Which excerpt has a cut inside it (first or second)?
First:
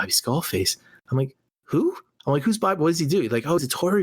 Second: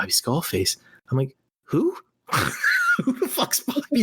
first